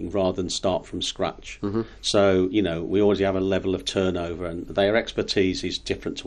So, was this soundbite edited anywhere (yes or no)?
no